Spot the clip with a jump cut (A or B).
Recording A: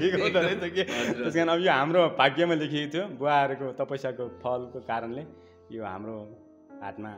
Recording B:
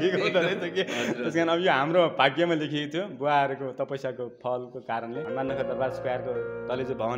B